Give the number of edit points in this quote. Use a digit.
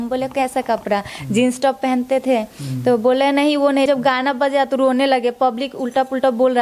1